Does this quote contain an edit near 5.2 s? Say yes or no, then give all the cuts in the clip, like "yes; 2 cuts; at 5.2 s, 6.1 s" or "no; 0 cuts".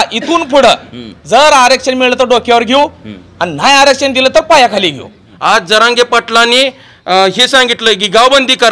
yes; 1 cut; at 5.2 s